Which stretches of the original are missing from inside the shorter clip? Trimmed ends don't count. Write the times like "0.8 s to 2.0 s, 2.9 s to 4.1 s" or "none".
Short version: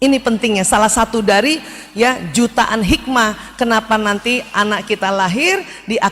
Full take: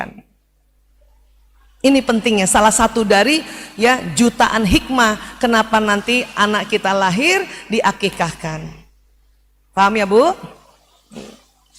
none